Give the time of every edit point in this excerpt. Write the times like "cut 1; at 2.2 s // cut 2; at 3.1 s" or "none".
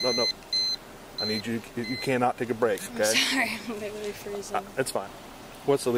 cut 1; at 5.0 s